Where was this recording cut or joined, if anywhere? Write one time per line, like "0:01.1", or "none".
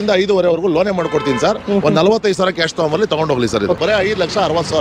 0:03.8